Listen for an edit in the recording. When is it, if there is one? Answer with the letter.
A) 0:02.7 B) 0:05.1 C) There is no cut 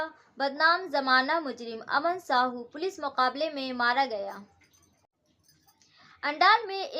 B